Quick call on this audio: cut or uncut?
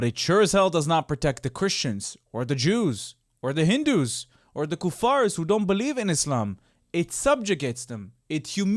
uncut